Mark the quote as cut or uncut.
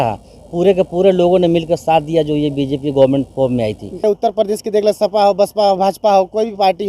cut